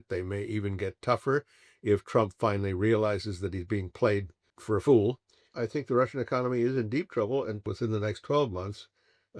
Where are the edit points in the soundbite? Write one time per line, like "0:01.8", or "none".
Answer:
0:04.5
0:05.5
0:07.6